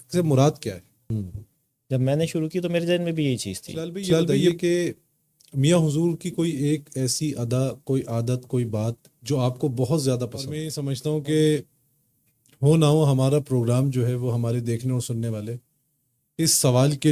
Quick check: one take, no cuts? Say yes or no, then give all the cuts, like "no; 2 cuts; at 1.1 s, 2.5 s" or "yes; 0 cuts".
no; 3 cuts; at 0.9 s, 4.0 s, 10.9 s